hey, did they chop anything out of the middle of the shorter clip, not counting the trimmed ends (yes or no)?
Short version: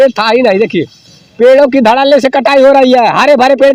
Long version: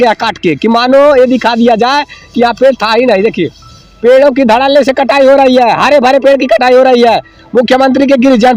no